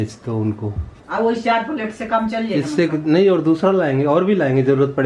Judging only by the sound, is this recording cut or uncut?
uncut